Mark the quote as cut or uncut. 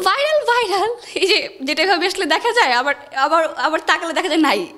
uncut